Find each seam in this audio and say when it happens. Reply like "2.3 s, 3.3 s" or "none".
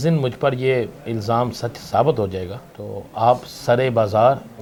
none